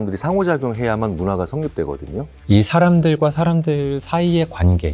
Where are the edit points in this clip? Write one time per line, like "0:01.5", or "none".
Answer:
0:02.4